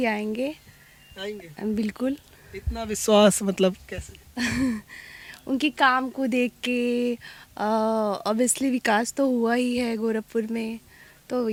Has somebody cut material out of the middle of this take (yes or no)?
no